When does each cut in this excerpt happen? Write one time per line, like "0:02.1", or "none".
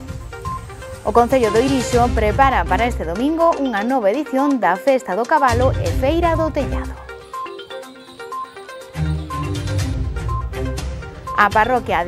none